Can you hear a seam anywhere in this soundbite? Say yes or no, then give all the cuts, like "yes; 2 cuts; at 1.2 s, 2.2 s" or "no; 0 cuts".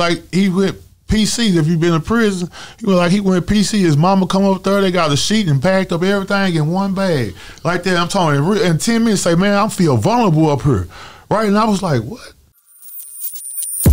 yes; 1 cut; at 12.7 s